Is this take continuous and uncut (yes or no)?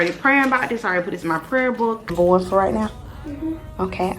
no